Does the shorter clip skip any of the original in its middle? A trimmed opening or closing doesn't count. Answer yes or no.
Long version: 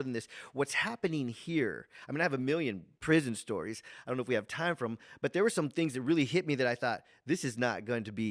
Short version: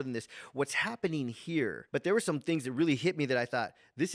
yes